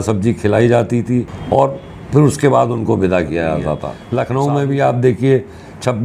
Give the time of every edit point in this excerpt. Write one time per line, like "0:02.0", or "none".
0:01.4
0:03.9